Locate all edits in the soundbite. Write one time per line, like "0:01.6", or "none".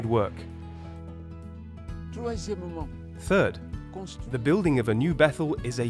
0:02.4